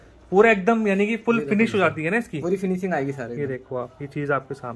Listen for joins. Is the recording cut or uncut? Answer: uncut